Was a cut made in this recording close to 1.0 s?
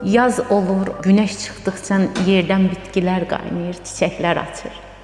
yes; 1 cut; at 1.0 s

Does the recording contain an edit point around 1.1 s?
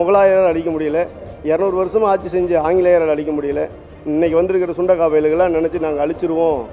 no; 0 cuts

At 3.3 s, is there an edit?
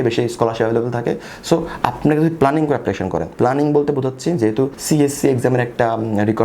yes; 2 cuts; at 3.3 s, 4.8 s

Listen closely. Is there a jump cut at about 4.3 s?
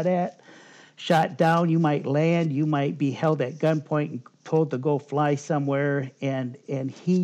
no; 0 cuts

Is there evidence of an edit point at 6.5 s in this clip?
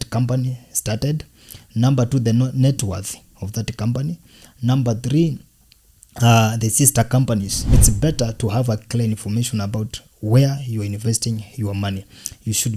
no; 1 cut; at 7.7 s

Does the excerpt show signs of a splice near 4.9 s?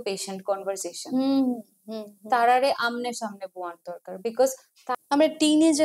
yes; 1 cut; at 4.9 s

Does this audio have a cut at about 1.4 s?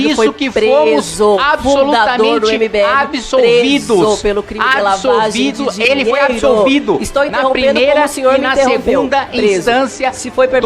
no; 0 cuts

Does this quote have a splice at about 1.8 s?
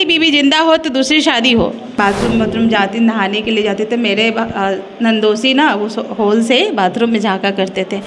yes; 1 cut; at 1.8 s

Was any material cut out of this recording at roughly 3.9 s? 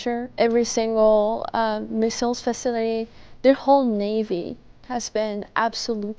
no; 0 cuts

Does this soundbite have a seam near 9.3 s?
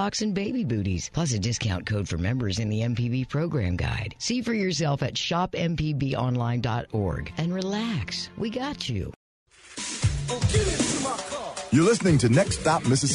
yes; 1 cut; at 9.3 s

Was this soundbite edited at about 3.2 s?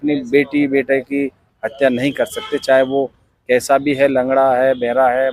no; 0 cuts

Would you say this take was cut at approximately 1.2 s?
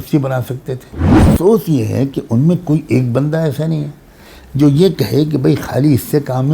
yes; 1 cut; at 1.2 s

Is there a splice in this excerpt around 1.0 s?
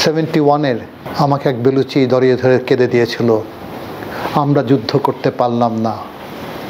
yes; 1 cut; at 1.0 s

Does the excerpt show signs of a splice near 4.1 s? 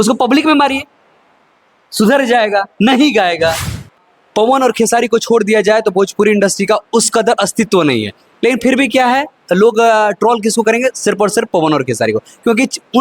yes; 1 cut; at 4.1 s

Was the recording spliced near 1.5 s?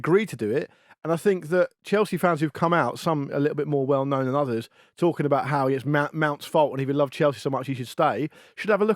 no; 0 cuts

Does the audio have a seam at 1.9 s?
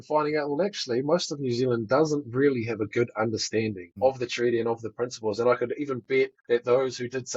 no; 2 cuts; at 3.9 s, 6.4 s

